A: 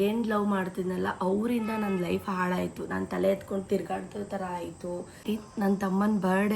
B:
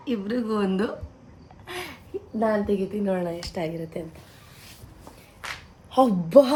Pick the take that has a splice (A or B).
A